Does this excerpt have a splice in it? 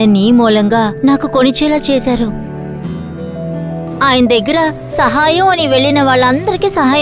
yes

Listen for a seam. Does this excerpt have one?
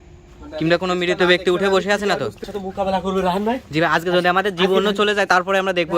yes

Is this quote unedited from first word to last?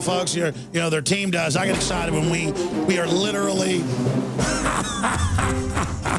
no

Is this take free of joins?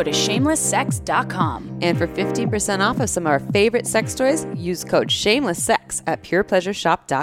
yes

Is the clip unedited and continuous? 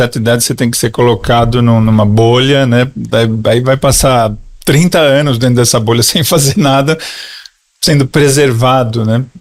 yes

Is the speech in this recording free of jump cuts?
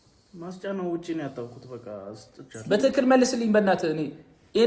yes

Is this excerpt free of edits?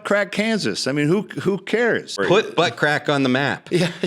no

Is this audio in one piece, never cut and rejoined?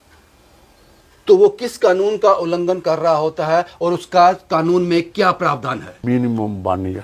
no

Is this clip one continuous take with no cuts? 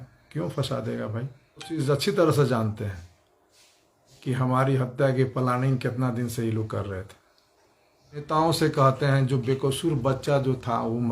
no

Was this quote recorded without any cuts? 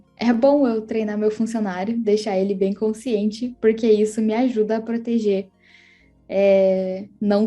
yes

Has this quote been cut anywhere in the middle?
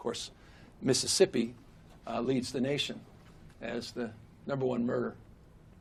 no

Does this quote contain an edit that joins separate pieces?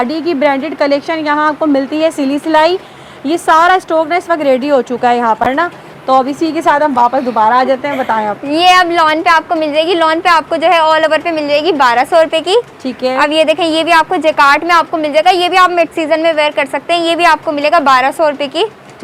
no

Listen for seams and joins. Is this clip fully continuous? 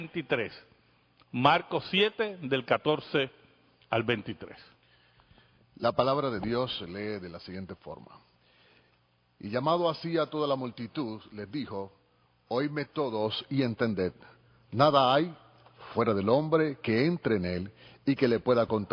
yes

